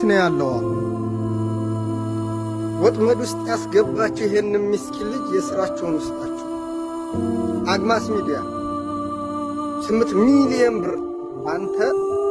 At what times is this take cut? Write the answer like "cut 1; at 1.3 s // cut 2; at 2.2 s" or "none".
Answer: none